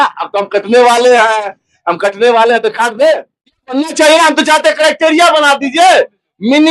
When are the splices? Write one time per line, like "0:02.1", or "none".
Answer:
0:03.7

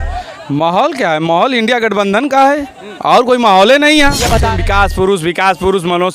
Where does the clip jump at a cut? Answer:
0:04.4

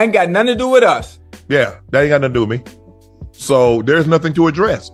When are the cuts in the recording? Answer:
none

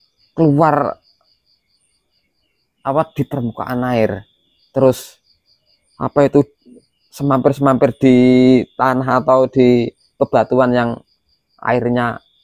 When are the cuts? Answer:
none

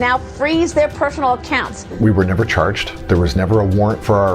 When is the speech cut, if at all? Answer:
0:01.8
0:02.9

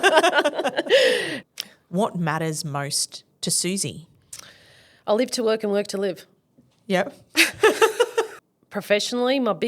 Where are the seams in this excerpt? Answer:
0:01.3
0:08.4

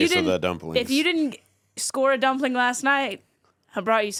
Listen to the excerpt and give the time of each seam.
none

